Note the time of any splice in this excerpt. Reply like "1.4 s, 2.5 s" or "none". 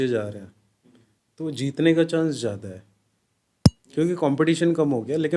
none